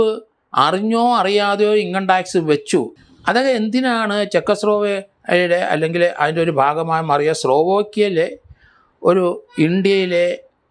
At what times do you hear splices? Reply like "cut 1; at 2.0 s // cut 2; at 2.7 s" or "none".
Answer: cut 1; at 3.0 s

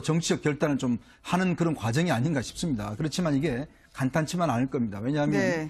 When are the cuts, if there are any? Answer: cut 1; at 3.3 s

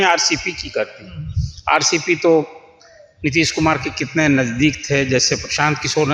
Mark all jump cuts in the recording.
none

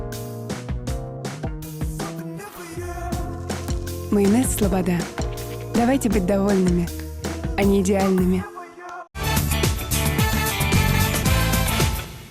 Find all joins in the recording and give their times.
cut 1; at 9.2 s

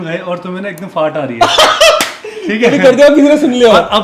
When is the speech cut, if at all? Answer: none

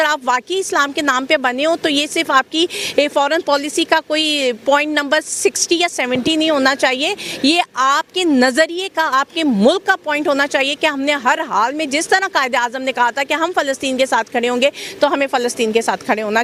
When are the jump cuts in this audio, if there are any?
none

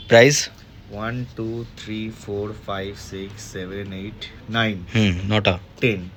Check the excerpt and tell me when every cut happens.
none

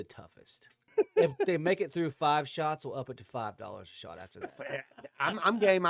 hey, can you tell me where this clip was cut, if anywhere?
cut 1; at 0.9 s

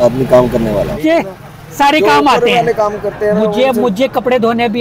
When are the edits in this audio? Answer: cut 1; at 0.9 s

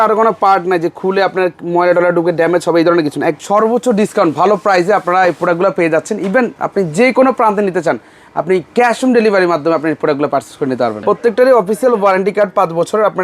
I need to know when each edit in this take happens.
cut 1; at 3.4 s // cut 2; at 11.0 s

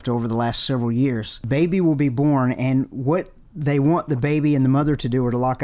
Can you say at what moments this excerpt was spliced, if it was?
cut 1; at 1.3 s

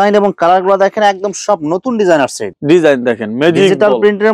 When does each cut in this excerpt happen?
cut 1; at 2.4 s

